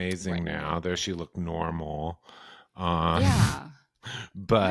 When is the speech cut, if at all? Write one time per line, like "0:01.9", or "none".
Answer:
none